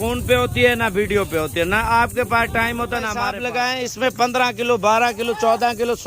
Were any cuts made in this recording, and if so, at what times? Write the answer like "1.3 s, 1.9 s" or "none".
3.1 s